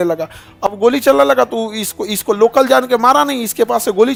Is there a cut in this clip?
no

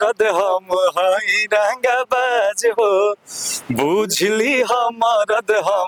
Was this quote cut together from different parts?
no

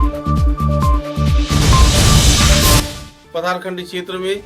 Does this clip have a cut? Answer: yes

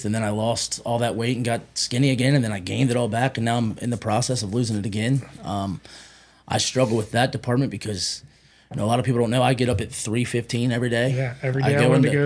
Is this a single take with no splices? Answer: yes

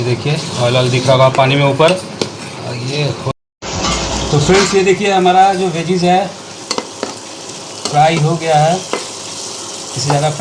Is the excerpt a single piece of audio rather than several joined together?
no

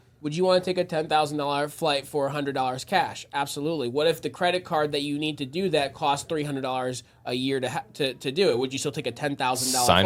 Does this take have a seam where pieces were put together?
no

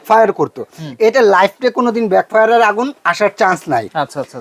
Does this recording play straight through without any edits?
yes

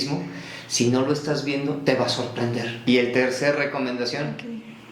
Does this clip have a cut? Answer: yes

